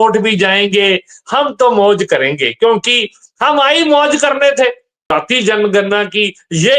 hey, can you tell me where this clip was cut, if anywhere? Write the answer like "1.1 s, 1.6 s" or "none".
5.1 s